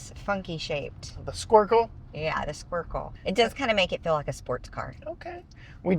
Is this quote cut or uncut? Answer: cut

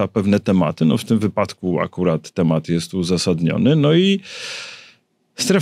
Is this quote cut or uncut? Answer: uncut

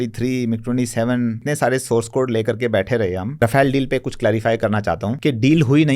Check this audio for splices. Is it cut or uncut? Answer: cut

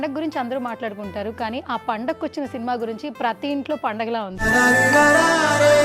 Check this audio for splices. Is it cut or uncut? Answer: cut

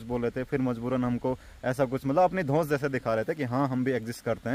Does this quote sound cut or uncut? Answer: uncut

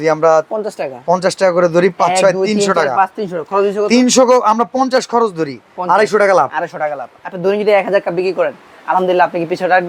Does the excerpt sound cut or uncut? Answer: uncut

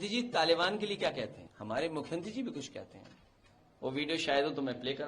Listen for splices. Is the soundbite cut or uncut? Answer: cut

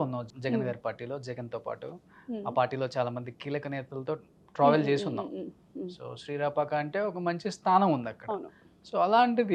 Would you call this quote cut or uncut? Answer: uncut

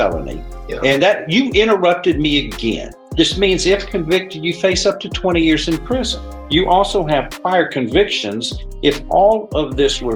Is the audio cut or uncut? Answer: uncut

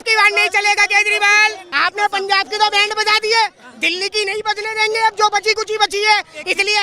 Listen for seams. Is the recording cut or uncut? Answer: cut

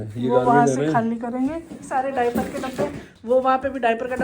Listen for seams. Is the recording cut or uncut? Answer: cut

